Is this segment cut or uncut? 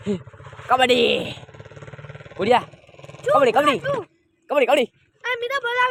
uncut